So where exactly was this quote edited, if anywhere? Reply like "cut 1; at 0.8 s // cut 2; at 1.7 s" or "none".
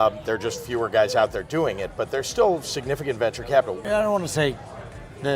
cut 1; at 3.8 s